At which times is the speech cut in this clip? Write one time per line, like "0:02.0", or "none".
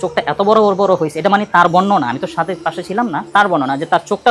none